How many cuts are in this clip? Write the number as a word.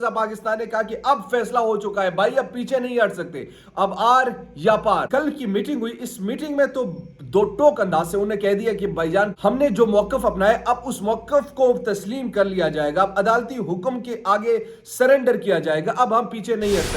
two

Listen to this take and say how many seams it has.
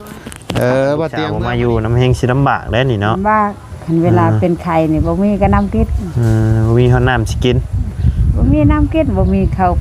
one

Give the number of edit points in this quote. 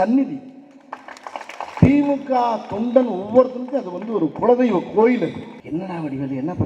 two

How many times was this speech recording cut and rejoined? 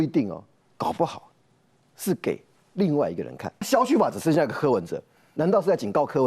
one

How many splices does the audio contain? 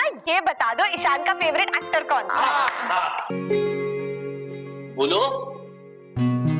one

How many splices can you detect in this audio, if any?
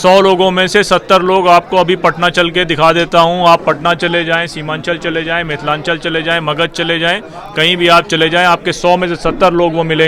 zero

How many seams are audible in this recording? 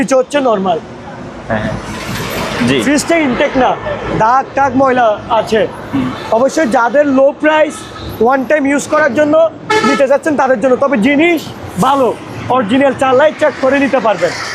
zero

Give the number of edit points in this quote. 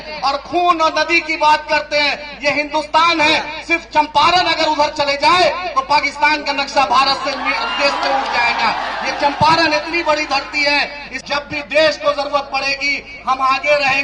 one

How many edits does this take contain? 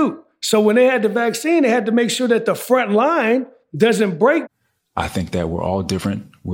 one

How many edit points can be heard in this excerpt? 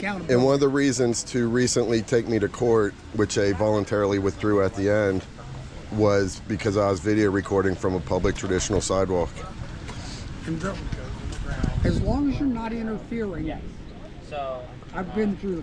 zero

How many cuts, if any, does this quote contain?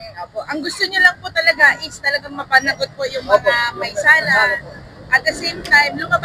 zero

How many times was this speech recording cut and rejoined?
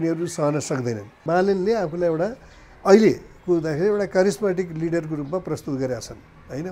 one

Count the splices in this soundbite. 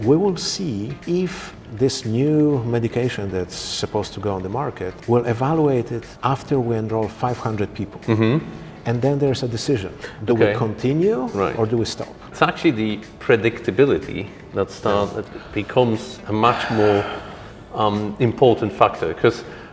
four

